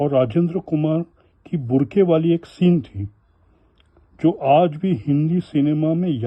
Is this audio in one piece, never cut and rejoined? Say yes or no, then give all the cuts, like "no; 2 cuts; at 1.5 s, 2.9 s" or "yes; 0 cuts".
yes; 0 cuts